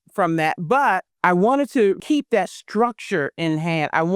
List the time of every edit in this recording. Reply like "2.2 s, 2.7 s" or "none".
1.1 s, 2.0 s